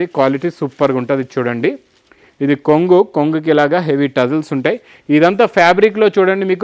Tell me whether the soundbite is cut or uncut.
uncut